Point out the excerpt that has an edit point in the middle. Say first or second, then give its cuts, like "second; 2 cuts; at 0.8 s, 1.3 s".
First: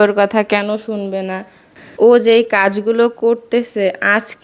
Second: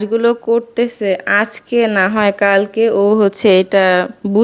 first; 1 cut; at 1.8 s